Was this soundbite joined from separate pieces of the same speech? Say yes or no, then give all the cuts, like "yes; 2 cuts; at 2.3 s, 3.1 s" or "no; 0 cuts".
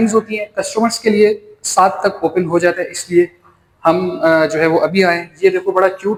no; 0 cuts